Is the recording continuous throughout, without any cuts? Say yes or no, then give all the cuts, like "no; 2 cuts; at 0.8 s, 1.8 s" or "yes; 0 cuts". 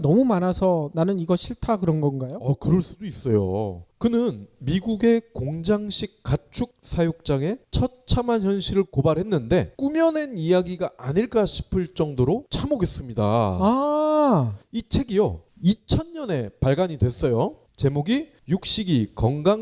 no; 1 cut; at 17.1 s